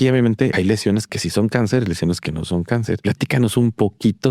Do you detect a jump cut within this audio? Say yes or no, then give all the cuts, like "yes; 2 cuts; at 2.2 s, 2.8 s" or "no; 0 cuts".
yes; 2 cuts; at 1.0 s, 3.0 s